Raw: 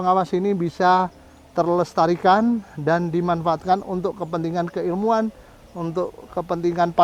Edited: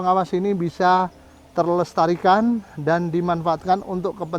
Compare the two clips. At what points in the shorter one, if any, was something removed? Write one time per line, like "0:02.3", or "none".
none